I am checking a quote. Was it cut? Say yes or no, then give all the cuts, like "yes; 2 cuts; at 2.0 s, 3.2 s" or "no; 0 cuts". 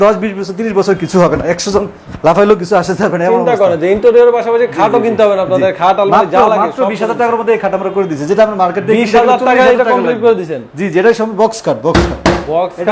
no; 0 cuts